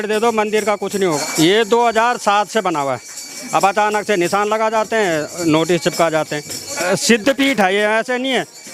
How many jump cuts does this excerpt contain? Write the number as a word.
three